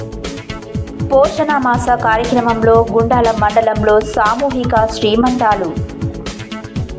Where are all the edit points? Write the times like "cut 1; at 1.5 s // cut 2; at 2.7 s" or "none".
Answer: cut 1; at 0.9 s